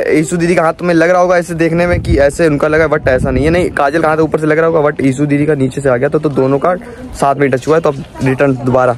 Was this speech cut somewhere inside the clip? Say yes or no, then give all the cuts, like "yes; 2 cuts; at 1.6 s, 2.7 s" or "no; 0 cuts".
no; 0 cuts